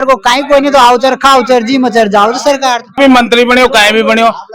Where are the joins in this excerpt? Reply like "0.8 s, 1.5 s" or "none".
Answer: 3.0 s